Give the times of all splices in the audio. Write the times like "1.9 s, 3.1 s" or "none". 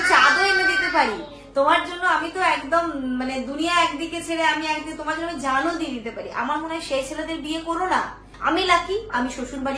8.2 s